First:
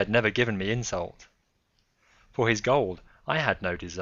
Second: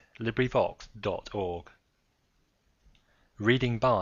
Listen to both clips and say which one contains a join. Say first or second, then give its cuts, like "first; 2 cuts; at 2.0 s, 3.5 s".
first; 1 cut; at 1.8 s